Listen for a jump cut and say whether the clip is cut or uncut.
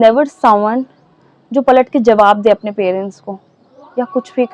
uncut